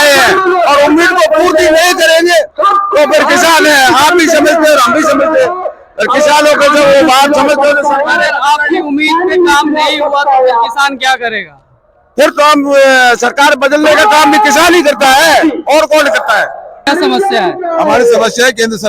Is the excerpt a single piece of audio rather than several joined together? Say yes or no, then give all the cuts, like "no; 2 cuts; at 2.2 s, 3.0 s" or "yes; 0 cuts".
no; 1 cut; at 16.8 s